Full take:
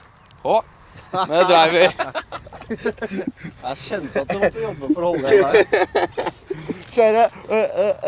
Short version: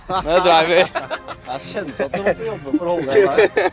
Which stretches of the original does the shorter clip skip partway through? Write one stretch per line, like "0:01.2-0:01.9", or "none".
0:02.4-0:03.5